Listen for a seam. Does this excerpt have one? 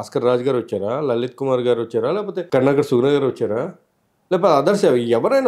yes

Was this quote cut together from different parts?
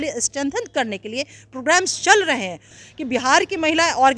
yes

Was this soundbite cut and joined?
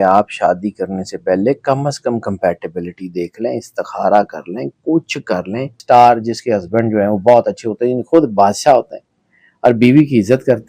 yes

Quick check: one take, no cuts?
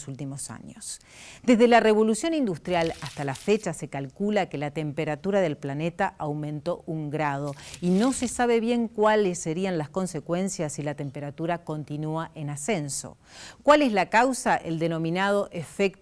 no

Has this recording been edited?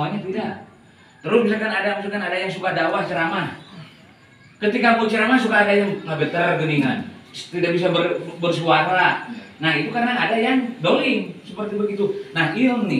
no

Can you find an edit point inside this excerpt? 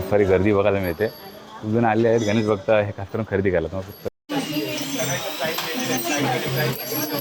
no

